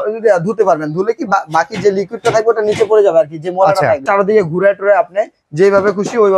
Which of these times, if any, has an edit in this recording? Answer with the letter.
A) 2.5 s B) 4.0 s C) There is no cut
B